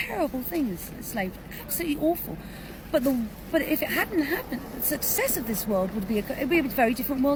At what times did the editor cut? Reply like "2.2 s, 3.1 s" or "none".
none